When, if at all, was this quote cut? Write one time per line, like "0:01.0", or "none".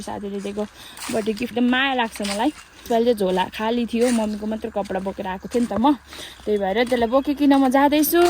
0:01.5
0:02.8